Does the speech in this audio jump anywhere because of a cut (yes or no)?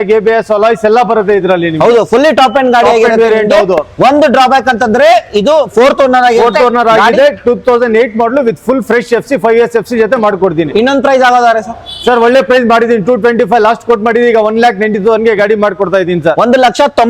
no